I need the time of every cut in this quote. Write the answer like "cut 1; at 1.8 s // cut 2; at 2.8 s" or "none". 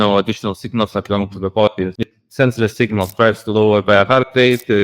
cut 1; at 1.9 s